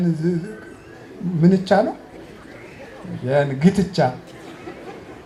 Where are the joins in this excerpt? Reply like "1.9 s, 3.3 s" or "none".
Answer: none